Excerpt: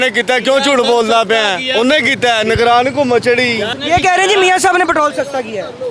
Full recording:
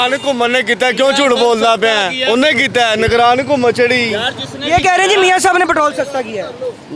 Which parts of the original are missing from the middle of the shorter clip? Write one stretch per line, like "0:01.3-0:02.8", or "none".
0:04.2-0:04.5